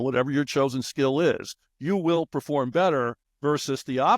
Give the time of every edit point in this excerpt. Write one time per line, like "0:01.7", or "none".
0:03.2